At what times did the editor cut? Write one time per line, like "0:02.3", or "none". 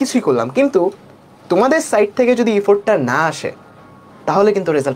none